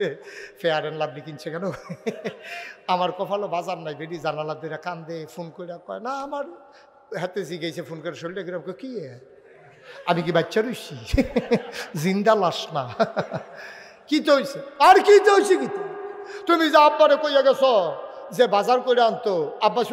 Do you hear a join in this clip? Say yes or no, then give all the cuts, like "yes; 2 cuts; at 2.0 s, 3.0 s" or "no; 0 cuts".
no; 0 cuts